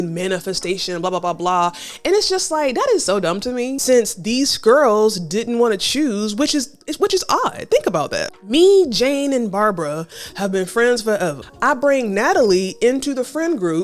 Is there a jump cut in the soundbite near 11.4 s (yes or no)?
yes